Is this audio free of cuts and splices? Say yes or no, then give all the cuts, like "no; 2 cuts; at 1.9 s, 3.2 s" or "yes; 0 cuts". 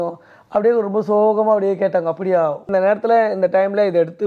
no; 1 cut; at 2.7 s